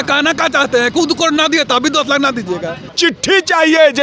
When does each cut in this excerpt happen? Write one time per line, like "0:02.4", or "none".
0:02.9